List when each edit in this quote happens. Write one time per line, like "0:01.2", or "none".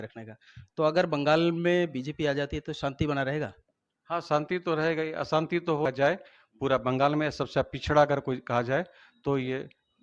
0:05.9

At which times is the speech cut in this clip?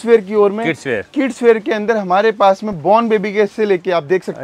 none

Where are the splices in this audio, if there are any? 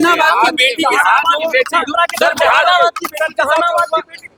none

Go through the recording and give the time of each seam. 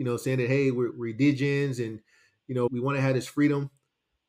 0:00.9
0:02.7

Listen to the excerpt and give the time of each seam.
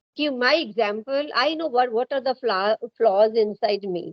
none

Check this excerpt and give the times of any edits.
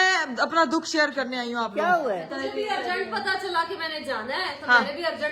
0:02.3

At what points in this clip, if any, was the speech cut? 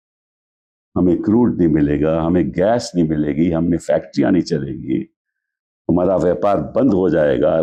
none

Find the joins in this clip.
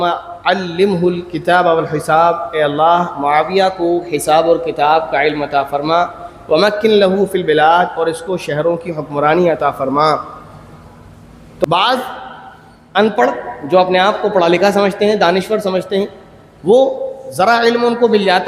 0:11.7

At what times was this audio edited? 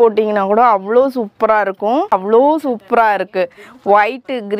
0:02.1

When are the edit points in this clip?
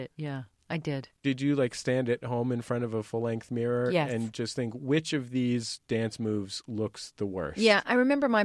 0:01.2

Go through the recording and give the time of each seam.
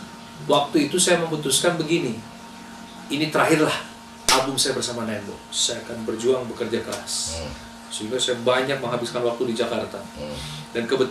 none

